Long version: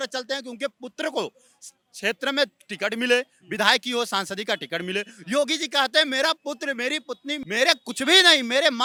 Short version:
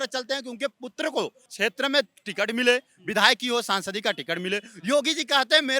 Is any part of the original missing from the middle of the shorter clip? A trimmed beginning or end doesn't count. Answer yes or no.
yes